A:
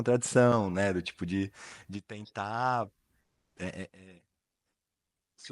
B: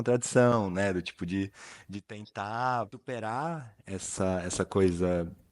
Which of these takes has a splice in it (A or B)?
B